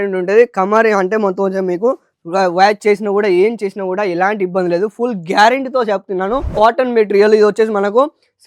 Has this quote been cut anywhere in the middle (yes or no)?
yes